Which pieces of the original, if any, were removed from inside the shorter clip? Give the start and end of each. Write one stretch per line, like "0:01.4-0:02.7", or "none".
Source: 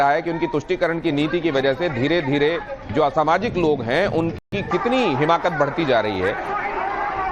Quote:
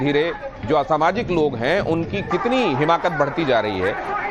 0:04.4-0:04.5